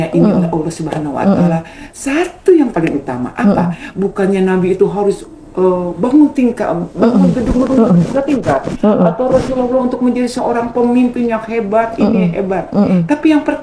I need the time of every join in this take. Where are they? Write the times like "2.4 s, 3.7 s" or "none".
none

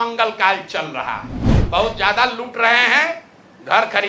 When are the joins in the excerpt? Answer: 1.4 s

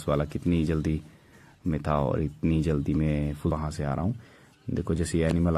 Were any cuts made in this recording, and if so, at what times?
3.5 s

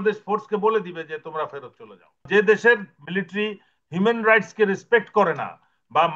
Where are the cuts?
2.3 s

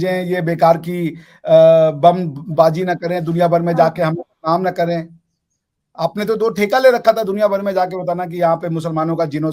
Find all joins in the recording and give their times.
none

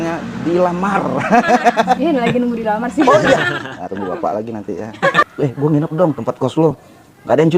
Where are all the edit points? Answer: 2.0 s, 5.2 s

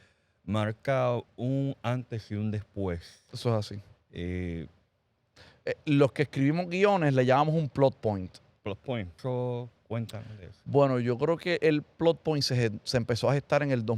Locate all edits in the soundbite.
9.1 s

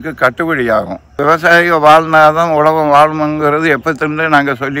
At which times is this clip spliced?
1.2 s

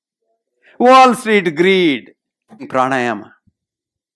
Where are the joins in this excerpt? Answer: 2.7 s

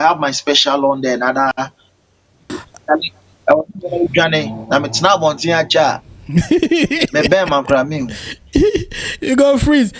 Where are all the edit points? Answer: 2.5 s

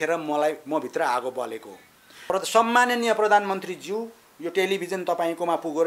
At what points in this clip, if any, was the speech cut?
2.3 s

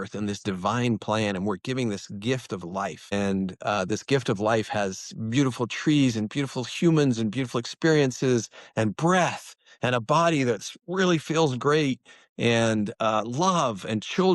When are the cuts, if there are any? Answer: 3.1 s

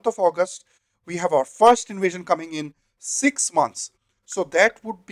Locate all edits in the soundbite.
none

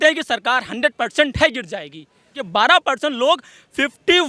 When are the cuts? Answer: 2.4 s

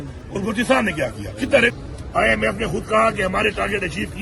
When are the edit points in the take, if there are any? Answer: 1.7 s

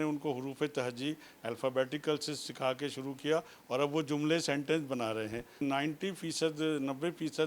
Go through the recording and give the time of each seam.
5.6 s

